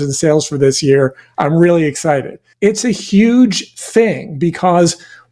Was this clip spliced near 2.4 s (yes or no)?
yes